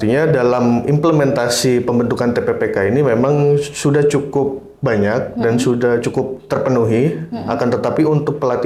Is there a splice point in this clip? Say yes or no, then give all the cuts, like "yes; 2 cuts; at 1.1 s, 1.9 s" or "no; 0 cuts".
no; 0 cuts